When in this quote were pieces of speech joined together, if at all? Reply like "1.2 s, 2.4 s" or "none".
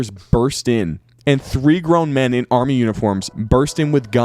3.3 s